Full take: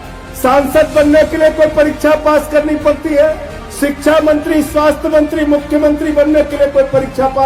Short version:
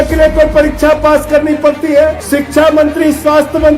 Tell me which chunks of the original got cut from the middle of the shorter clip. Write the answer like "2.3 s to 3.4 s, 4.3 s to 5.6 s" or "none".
3.4 s to 3.7 s